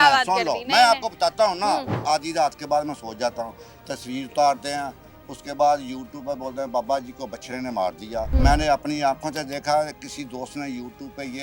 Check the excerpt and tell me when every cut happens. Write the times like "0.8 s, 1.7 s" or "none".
2.0 s, 8.3 s